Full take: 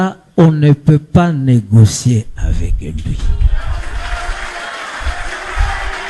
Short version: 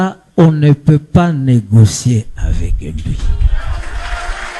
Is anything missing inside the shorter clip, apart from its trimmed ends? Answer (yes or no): no